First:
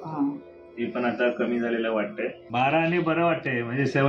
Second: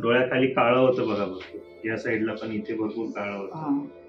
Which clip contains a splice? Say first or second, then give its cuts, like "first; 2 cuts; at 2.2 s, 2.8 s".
first; 1 cut; at 2.5 s